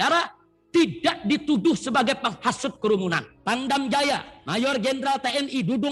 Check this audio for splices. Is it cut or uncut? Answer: cut